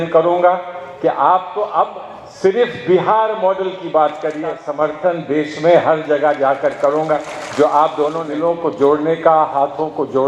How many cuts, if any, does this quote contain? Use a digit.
2